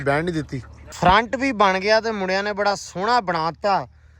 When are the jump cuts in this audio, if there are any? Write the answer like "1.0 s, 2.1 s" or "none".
0.9 s